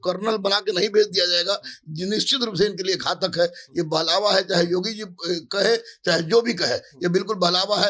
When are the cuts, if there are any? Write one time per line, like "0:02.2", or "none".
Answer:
none